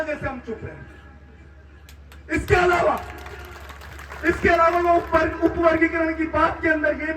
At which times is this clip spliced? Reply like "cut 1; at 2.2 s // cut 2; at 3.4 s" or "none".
none